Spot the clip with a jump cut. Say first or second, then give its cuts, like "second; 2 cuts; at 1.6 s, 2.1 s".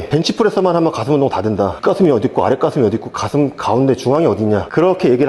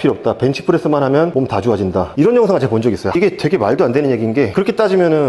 second; 1 cut; at 3.2 s